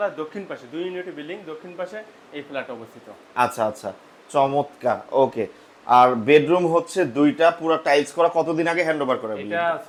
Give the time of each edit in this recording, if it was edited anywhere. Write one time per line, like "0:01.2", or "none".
none